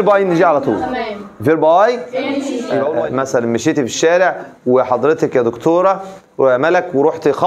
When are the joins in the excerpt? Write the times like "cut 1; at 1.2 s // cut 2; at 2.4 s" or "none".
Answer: cut 1; at 2.7 s